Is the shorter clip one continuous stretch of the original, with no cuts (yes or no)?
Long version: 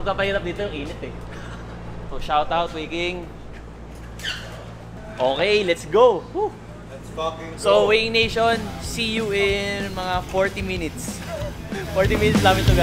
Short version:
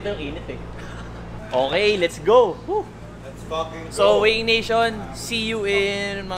no